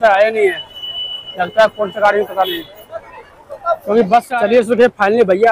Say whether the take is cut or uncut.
cut